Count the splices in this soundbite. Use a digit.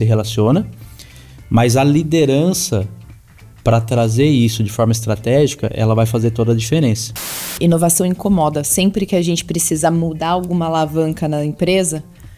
1